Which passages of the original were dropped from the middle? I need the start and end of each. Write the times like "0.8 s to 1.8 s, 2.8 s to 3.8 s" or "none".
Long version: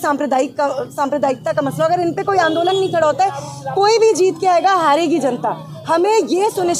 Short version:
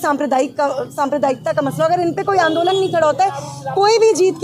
none